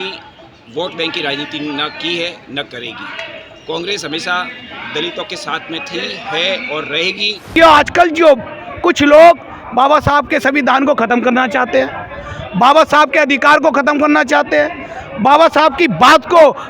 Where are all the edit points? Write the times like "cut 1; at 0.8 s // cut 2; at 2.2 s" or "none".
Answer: cut 1; at 7.5 s